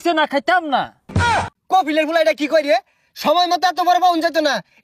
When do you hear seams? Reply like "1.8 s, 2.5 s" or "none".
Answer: 1.2 s